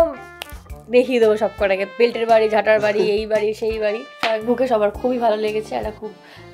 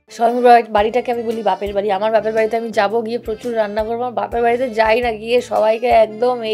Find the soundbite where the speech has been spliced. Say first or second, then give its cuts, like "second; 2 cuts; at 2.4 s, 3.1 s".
first; 2 cuts; at 1.9 s, 4.1 s